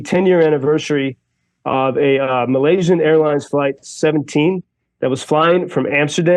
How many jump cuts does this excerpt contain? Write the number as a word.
zero